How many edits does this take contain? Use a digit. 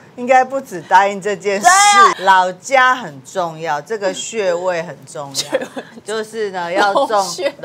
1